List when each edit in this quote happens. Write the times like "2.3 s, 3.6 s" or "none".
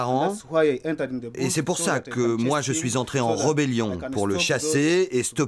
none